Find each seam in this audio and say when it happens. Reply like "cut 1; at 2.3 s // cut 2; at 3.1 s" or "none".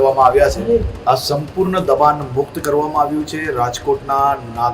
cut 1; at 0.9 s